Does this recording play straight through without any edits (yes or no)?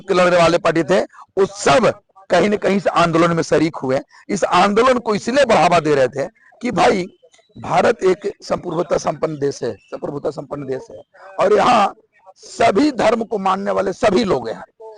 yes